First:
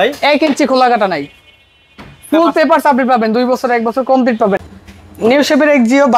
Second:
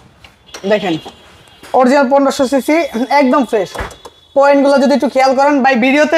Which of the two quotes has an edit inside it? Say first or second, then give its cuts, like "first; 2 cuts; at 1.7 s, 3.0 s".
first; 1 cut; at 4.7 s